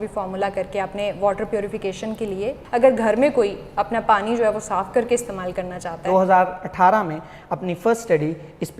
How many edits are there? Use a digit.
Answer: 2